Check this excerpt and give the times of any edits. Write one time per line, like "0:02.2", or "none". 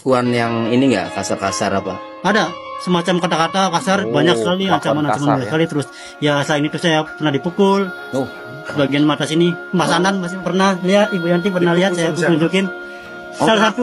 none